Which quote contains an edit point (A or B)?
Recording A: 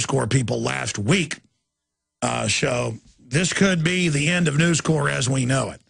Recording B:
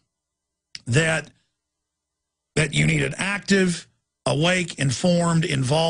A